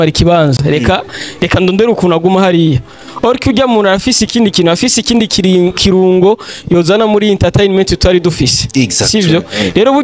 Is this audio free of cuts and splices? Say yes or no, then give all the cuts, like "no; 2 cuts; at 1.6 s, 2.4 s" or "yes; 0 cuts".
yes; 0 cuts